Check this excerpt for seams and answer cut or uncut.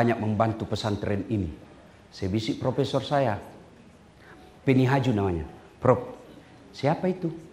uncut